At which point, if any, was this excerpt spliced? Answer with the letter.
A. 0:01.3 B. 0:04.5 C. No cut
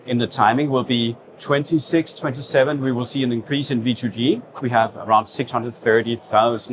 B